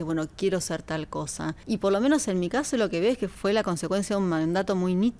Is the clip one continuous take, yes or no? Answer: no